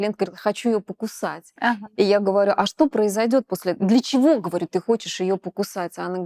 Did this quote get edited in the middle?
no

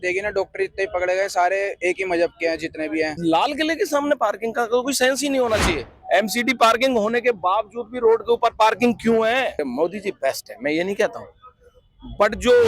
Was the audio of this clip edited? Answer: yes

